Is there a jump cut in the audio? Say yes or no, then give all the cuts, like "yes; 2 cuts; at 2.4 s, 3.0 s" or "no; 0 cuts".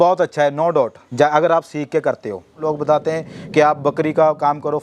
yes; 2 cuts; at 1.0 s, 2.6 s